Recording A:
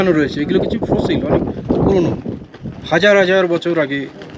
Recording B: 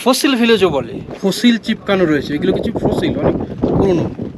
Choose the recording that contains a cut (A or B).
B